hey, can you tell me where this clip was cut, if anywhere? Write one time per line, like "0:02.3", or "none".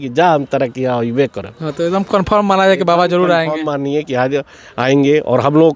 none